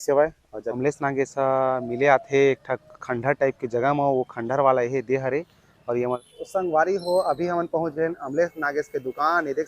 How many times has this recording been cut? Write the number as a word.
two